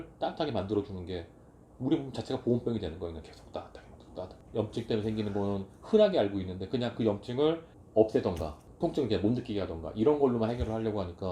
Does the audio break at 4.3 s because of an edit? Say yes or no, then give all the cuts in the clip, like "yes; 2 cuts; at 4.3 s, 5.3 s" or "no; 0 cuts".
yes; 1 cut; at 4.3 s